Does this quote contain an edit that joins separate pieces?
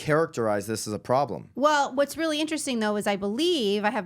yes; 1 cut; at 1.5 s

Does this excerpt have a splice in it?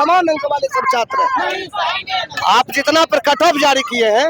no; 0 cuts

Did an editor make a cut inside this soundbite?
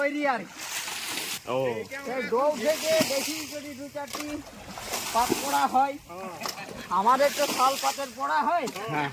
yes; 1 cut; at 1.3 s

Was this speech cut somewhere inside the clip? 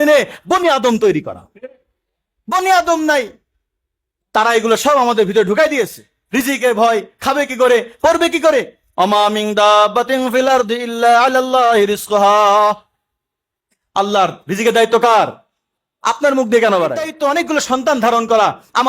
yes; 1 cut; at 17.1 s

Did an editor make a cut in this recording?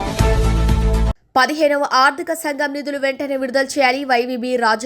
yes; 1 cut; at 1.1 s

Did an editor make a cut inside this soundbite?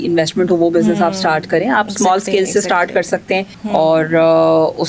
yes; 1 cut; at 3.5 s

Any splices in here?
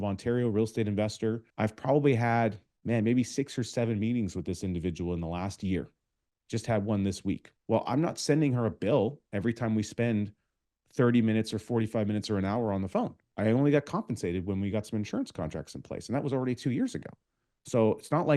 yes; 3 cuts; at 1.5 s, 2.7 s, 7.5 s

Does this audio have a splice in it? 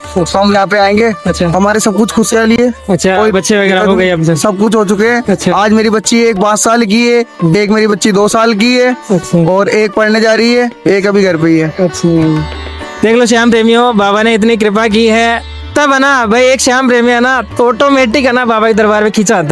no; 0 cuts

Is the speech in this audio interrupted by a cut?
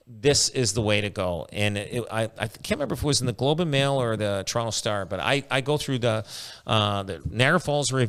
no; 0 cuts

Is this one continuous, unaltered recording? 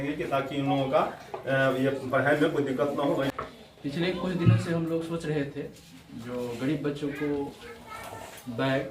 no; 1 cut; at 3.3 s

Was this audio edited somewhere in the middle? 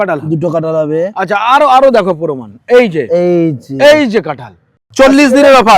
yes; 1 cut; at 4.8 s

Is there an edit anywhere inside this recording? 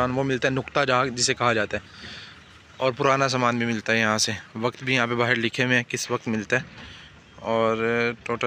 no; 0 cuts

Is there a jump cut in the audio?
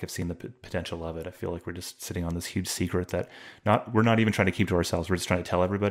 no; 0 cuts

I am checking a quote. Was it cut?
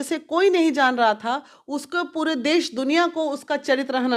no; 0 cuts

